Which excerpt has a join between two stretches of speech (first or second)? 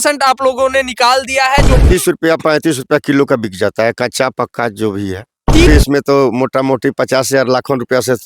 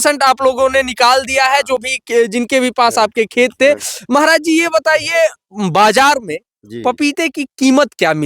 first